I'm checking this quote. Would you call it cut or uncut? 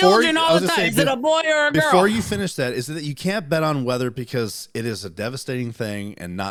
uncut